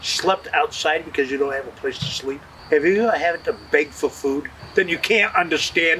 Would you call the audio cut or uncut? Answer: cut